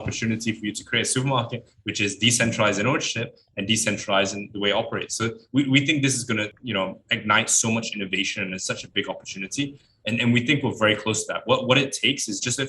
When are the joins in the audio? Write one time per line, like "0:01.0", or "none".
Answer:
0:06.6
0:09.9